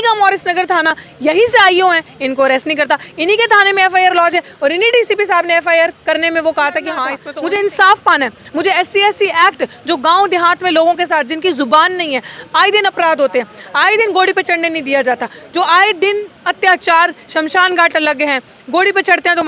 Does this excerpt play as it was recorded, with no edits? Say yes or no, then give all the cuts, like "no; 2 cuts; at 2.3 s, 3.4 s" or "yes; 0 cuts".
no; 1 cut; at 7.2 s